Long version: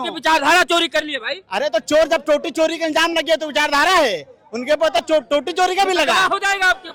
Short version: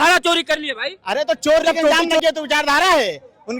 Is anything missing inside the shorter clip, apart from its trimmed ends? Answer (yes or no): yes